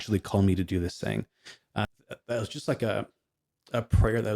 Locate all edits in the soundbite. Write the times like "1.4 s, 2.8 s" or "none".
1.9 s